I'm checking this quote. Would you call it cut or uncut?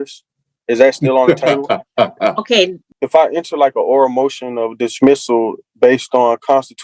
cut